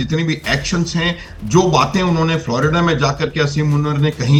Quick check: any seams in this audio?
no; 0 cuts

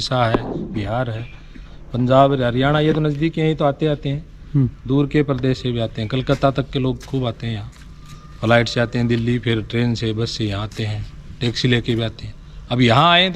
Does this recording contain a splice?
no; 0 cuts

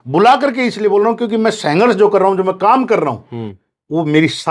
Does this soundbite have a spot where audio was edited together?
no; 0 cuts

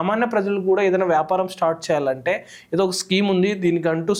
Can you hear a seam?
no; 0 cuts

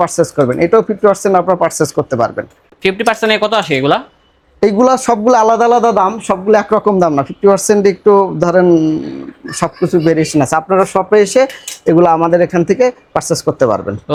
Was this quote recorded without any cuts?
yes; 0 cuts

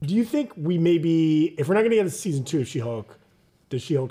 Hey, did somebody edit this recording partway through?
no; 0 cuts

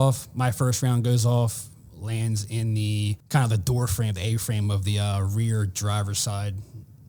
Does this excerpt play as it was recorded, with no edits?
no; 1 cut; at 3.2 s

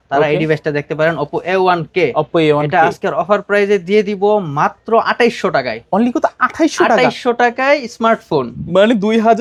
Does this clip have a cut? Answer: no; 0 cuts

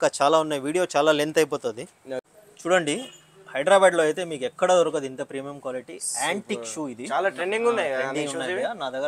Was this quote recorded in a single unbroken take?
no; 1 cut; at 2.3 s

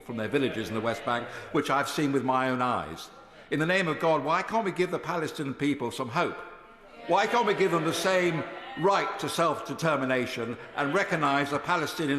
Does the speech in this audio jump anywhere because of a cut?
no; 0 cuts

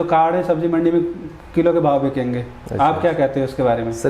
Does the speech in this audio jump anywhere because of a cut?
no; 0 cuts

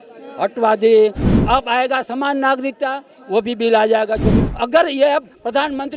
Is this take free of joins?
no; 1 cut; at 4.4 s

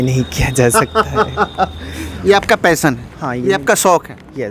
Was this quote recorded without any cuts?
no; 1 cut; at 2.2 s

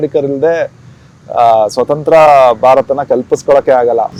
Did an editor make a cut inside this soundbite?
no; 0 cuts

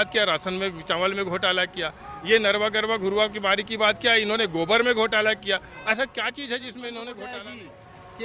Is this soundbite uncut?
no; 1 cut; at 7.2 s

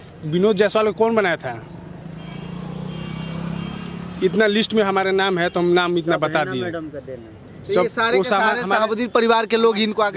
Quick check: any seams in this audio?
no; 0 cuts

